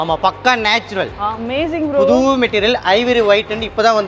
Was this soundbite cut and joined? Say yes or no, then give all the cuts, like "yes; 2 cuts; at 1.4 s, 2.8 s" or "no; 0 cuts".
yes; 1 cut; at 1.1 s